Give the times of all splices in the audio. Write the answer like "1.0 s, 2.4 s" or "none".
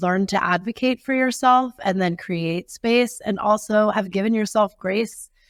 none